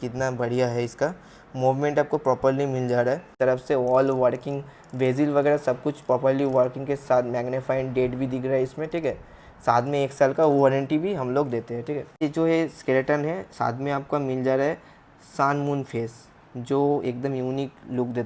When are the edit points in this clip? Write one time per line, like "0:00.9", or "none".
0:03.3
0:12.2